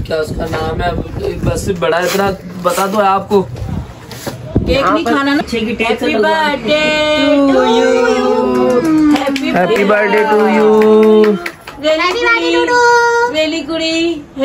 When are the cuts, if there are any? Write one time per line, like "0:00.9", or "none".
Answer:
0:03.4
0:05.4
0:11.3

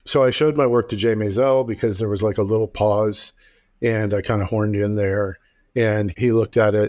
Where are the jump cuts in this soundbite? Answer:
none

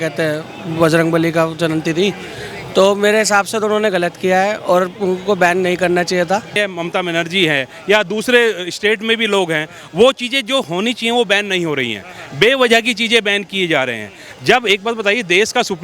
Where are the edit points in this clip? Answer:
0:06.5

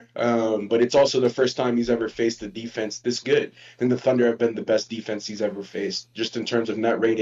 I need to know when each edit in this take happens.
none

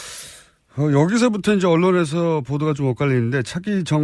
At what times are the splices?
none

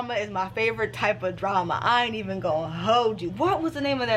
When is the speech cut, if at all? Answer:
none

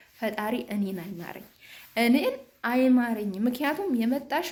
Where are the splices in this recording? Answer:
none

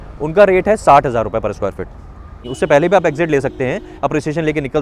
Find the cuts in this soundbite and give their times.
0:02.5

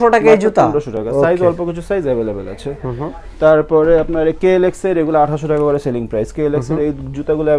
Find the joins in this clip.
none

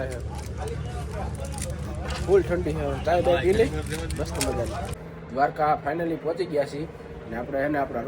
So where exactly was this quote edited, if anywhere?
0:04.9

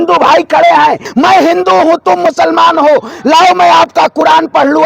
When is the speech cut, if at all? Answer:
0:01.0

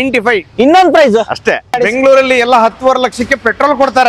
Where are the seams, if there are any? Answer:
0:01.8

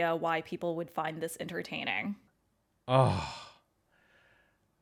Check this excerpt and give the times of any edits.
none

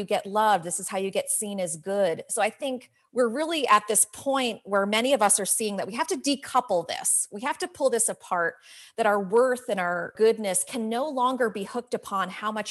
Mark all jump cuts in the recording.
0:10.1

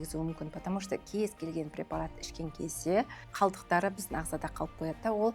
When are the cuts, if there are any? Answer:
0:03.2

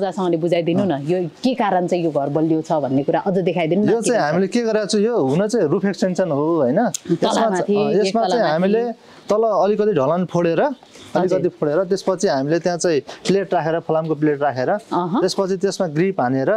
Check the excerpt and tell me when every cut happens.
none

